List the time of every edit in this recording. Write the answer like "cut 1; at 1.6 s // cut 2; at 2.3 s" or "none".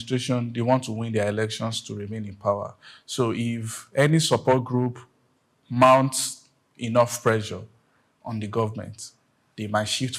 none